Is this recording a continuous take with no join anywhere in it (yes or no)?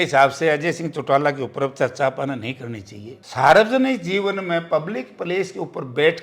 yes